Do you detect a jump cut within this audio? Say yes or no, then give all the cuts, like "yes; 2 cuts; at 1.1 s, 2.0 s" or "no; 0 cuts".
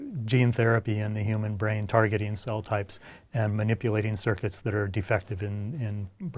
no; 0 cuts